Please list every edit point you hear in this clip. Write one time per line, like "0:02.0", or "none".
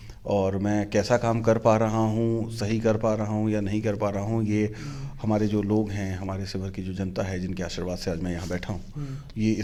none